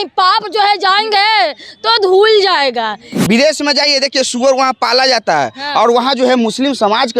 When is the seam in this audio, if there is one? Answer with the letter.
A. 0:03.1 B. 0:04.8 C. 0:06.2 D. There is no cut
A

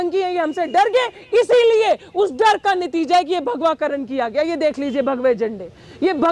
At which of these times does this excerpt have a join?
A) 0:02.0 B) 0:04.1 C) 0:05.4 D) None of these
D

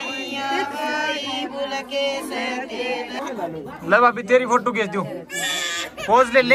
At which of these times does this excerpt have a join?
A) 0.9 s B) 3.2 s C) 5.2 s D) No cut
B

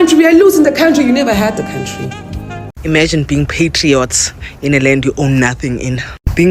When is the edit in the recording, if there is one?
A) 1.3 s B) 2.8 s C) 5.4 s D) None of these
B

